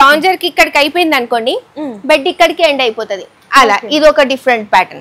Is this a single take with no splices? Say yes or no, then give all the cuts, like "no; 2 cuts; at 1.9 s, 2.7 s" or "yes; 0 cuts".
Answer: yes; 0 cuts